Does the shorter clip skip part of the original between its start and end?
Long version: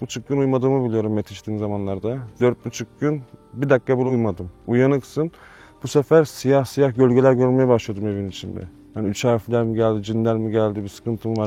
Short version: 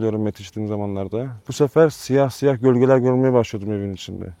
yes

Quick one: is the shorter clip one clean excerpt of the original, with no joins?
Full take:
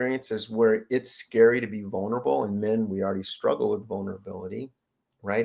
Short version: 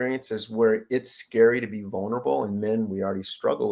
yes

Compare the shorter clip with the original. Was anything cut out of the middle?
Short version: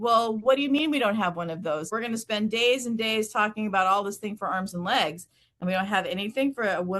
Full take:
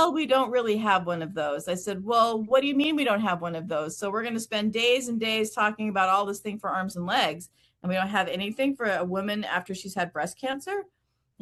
yes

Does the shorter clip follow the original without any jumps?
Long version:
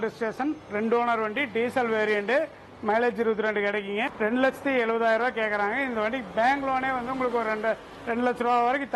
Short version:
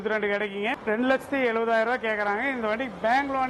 yes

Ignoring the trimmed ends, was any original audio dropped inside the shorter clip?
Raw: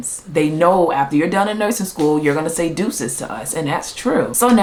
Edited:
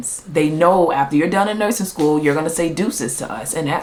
no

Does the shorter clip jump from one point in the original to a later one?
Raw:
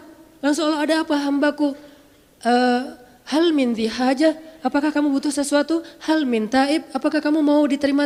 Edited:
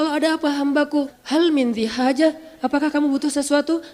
yes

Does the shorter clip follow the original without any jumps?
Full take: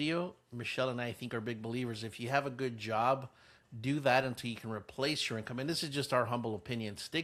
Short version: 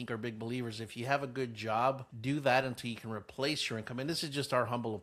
no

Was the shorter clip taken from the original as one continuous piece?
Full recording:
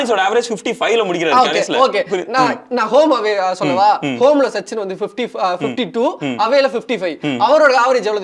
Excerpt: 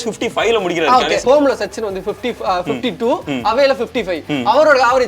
no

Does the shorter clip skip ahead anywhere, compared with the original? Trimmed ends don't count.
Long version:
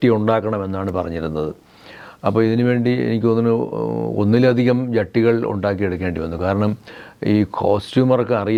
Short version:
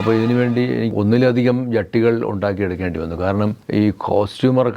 yes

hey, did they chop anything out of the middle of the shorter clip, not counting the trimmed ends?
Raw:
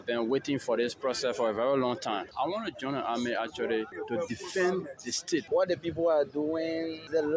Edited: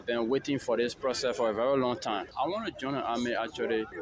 no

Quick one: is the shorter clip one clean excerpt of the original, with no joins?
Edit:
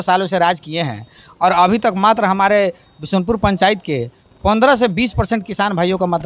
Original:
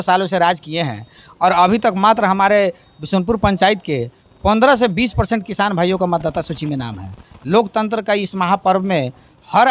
yes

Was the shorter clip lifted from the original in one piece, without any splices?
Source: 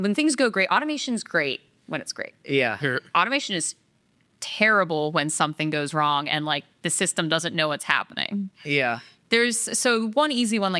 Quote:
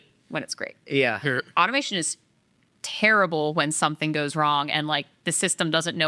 yes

